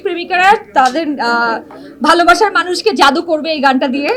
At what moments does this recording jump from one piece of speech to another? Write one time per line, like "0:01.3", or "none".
none